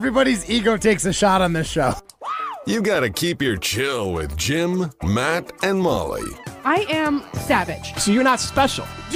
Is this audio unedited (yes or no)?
yes